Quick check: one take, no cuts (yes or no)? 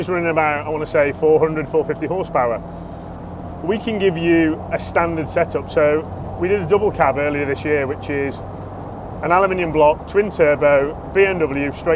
yes